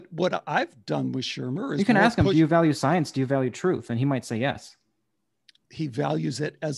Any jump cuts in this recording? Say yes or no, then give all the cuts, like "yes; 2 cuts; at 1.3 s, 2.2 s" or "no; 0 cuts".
yes; 1 cut; at 5.6 s